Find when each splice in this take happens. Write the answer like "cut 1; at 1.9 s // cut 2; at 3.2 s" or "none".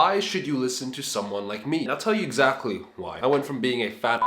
cut 1; at 1.9 s // cut 2; at 3.0 s